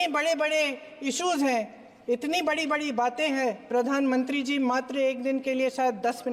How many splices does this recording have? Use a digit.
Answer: 0